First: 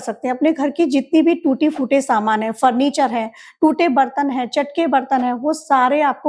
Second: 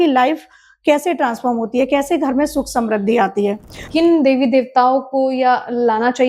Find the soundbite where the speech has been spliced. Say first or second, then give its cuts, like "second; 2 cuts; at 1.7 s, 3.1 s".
second; 1 cut; at 3.8 s